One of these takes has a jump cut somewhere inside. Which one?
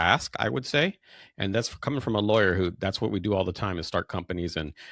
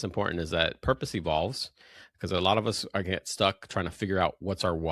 second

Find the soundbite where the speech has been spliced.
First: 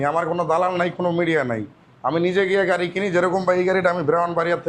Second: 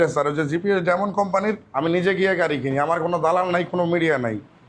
second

